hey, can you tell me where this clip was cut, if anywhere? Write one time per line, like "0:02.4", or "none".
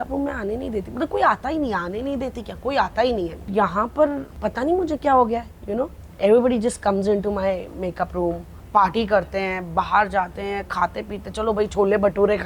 0:03.5
0:04.3
0:08.5